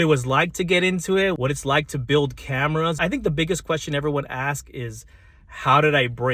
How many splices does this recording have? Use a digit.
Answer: 2